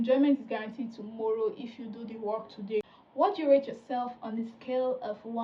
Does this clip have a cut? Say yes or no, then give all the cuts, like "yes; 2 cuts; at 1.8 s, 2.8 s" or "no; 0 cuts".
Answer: yes; 1 cut; at 2.8 s